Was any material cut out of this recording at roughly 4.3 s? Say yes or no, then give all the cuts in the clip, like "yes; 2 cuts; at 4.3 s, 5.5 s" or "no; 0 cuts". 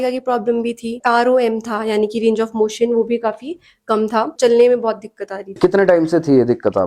yes; 3 cuts; at 1.0 s, 4.3 s, 5.5 s